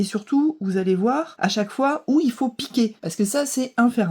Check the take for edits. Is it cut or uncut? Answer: cut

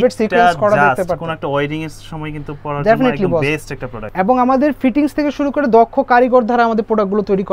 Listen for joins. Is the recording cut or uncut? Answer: cut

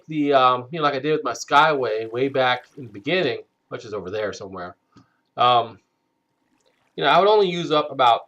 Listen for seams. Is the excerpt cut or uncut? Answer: cut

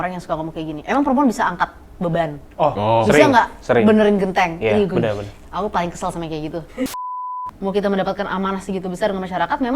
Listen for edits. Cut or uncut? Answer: cut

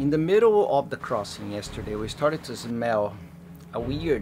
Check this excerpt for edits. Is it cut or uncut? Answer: uncut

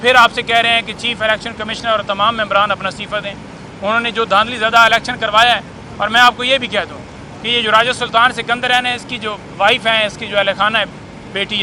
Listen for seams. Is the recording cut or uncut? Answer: uncut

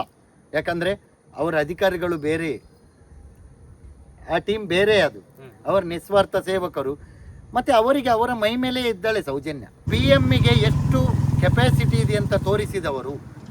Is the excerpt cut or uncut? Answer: cut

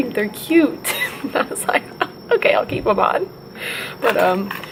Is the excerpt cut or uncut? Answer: uncut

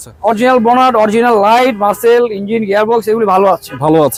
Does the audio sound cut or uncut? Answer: uncut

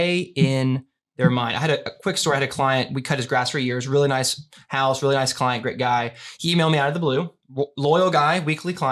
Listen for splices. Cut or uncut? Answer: uncut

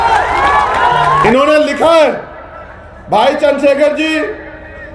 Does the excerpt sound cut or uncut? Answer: cut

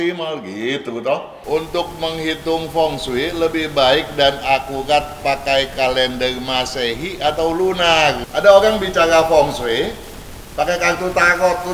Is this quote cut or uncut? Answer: cut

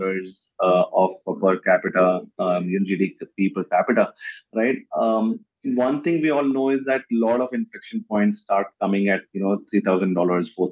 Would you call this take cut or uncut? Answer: uncut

